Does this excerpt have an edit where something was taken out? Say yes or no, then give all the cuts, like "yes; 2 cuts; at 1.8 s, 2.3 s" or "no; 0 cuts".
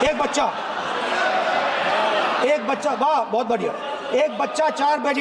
no; 0 cuts